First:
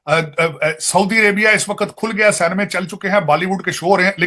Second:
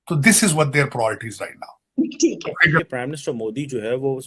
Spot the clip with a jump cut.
second; 1 cut; at 2.8 s

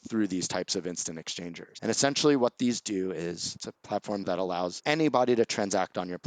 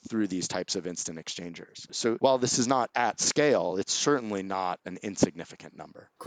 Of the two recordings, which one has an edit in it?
first; 2 cuts; at 1.6 s, 4.2 s

